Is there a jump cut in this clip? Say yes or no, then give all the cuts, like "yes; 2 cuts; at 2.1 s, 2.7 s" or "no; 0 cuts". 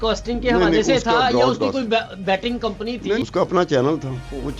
yes; 1 cut; at 3.2 s